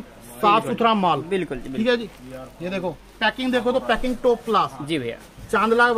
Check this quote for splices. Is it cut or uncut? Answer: uncut